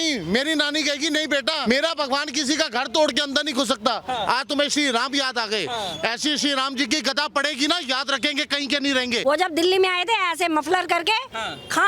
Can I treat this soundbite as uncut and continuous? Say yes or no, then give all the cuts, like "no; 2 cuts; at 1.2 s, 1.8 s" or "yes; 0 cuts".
no; 2 cuts; at 1.6 s, 9.2 s